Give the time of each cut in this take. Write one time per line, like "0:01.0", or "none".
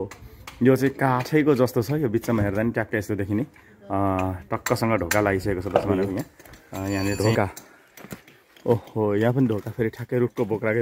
0:07.2